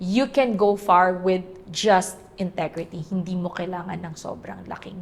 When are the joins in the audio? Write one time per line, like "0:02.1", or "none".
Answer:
none